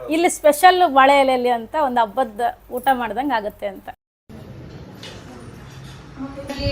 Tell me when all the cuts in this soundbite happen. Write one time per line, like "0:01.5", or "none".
0:03.8